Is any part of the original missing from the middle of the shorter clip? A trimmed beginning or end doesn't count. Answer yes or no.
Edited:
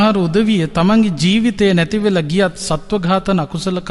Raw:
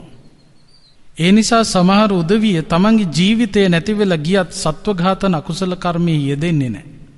no